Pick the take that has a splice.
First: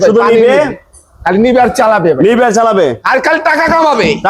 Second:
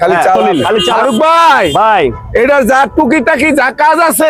second; 1 cut; at 0.9 s

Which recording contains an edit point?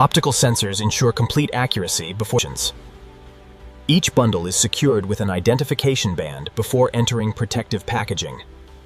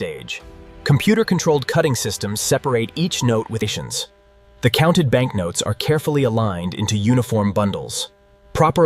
second; 1 cut; at 3.7 s

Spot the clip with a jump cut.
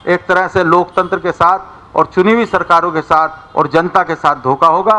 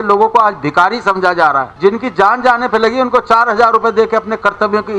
second; 1 cut; at 1.7 s

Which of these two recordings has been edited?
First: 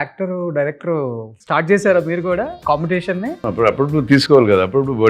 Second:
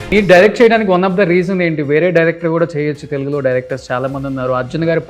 first; 3 cuts; at 1.3 s, 2.6 s, 3.4 s

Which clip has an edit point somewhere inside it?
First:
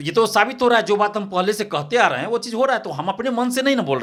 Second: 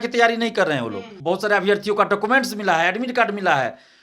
second; 1 cut; at 1.1 s

